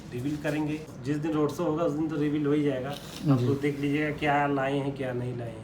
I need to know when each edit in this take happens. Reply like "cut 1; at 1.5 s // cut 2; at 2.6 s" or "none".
cut 1; at 0.9 s